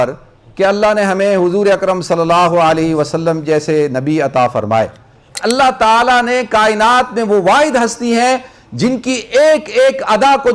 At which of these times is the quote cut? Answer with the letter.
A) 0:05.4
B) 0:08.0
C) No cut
A